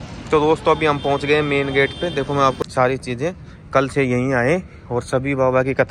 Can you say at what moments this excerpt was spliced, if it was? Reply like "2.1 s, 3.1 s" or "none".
2.6 s